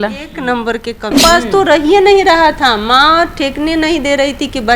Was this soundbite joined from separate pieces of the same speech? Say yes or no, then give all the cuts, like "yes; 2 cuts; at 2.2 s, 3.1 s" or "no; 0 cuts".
yes; 1 cut; at 1.1 s